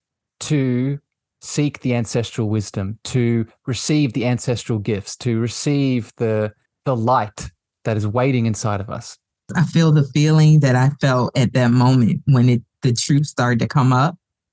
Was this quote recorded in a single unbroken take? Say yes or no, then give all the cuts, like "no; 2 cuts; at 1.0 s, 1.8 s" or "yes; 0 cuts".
no; 2 cuts; at 6.7 s, 9.5 s